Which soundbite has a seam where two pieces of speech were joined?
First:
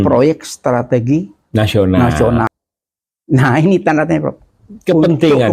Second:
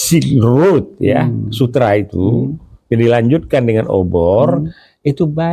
first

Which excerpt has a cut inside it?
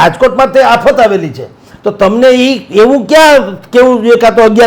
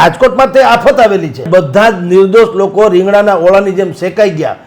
second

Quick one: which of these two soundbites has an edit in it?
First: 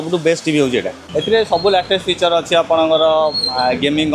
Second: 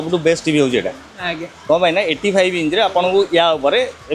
first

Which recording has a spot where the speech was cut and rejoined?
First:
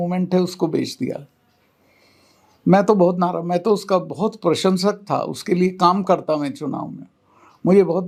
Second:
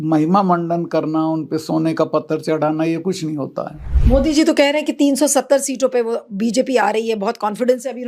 second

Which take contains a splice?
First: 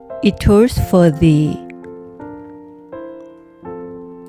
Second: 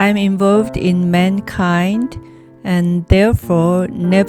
first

